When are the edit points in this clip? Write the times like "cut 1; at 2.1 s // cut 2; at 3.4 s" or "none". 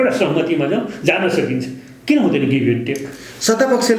none